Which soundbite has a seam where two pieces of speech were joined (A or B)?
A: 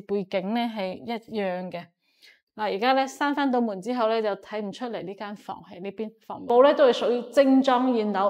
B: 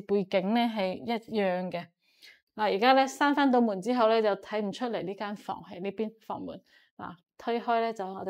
A